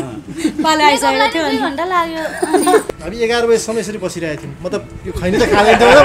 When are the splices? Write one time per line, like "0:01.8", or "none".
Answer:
0:02.8